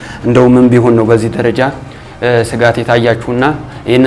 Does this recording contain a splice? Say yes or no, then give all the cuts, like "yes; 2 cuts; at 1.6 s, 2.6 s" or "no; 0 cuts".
no; 0 cuts